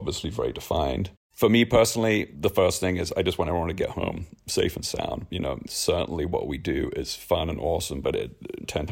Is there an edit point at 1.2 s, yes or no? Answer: yes